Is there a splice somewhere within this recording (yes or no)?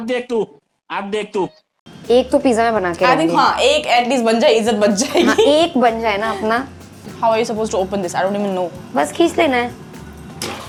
no